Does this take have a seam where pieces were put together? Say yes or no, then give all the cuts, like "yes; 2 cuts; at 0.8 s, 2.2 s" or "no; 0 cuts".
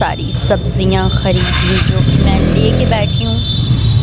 no; 0 cuts